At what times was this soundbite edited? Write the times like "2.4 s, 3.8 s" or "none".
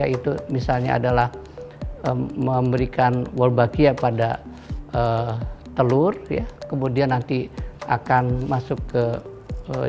none

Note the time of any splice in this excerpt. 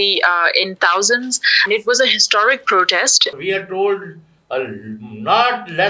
1.6 s, 3.3 s

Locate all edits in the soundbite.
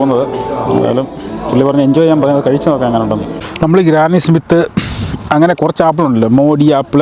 3.4 s

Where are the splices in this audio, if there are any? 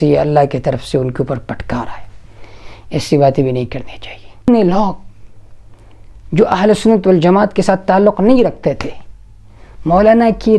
4.5 s

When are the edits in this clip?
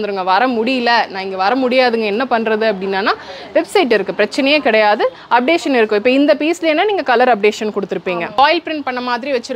8.4 s

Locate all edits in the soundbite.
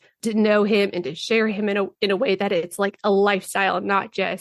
none

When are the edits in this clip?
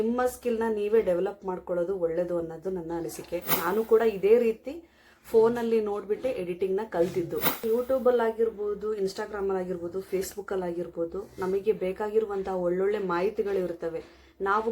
7.6 s

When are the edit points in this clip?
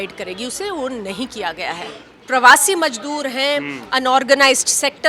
2.1 s

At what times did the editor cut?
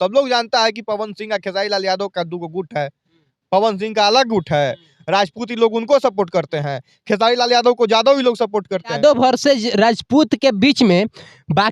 8.9 s

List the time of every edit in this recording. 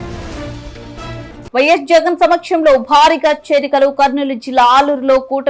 none

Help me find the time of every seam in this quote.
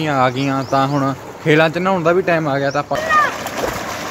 3.1 s

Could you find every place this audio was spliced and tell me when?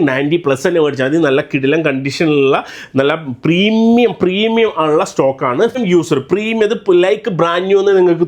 5.8 s

